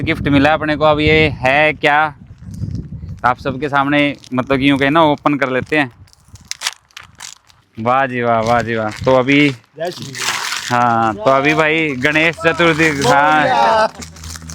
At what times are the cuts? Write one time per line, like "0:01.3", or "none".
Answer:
none

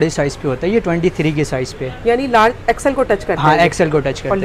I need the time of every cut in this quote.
none

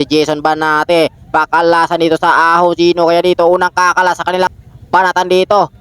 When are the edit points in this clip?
0:04.5

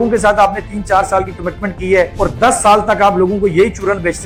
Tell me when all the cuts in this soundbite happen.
none

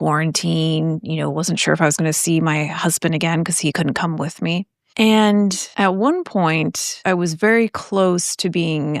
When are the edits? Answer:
0:03.7
0:04.8
0:05.6
0:06.9

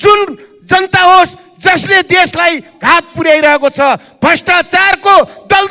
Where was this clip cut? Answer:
none

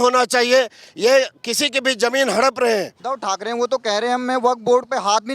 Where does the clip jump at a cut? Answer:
0:03.0

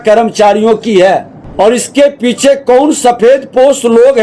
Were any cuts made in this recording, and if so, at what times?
0:01.4

